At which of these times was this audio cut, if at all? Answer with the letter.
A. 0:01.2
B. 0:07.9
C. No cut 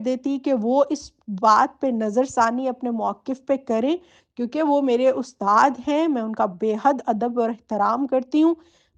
C